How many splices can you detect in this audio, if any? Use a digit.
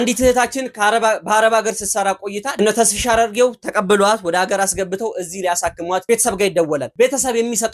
2